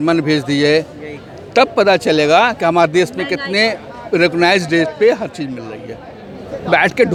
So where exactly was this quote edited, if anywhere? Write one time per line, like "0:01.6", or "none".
none